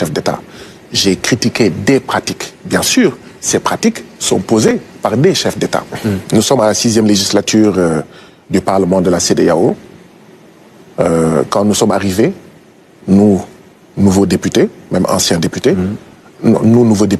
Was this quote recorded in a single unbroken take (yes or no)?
no